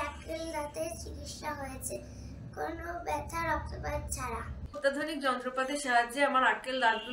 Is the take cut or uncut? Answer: cut